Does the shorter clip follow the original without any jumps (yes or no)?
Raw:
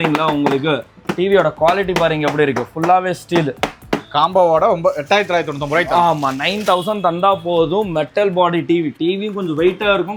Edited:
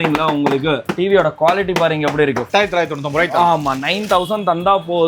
no